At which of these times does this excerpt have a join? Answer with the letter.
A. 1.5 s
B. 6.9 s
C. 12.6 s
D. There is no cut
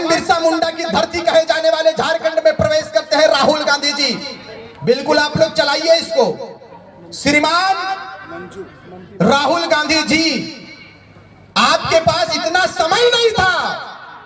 D